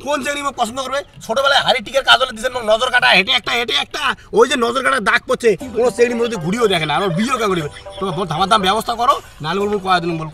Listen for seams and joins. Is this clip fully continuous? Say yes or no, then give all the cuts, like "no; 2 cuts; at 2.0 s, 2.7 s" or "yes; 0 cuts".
yes; 0 cuts